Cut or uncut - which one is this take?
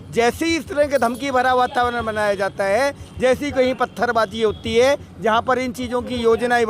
uncut